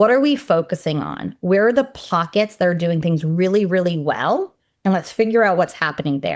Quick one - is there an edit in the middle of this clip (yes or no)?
no